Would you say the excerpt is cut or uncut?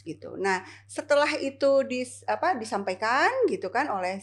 uncut